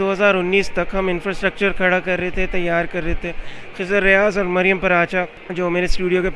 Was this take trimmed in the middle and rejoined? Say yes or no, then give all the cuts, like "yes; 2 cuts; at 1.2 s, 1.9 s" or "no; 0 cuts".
yes; 1 cut; at 5.4 s